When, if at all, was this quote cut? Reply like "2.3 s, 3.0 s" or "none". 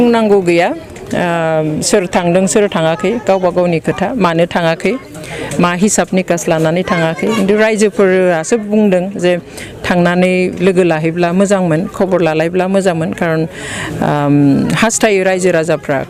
none